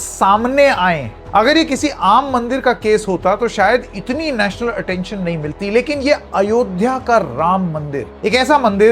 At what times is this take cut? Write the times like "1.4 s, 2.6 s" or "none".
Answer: 1.1 s